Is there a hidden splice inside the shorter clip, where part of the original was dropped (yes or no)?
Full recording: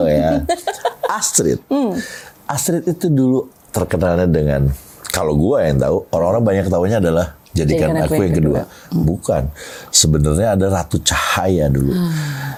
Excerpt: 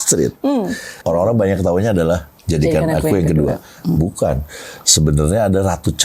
yes